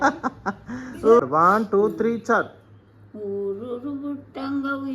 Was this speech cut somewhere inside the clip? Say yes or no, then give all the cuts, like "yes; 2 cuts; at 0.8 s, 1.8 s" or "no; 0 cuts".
yes; 1 cut; at 1.2 s